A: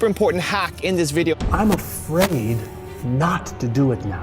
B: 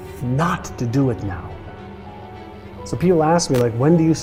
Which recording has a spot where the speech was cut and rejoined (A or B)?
A